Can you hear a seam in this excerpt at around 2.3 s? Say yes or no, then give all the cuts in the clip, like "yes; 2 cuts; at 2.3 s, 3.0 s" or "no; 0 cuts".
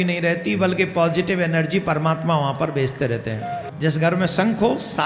no; 1 cut; at 3.7 s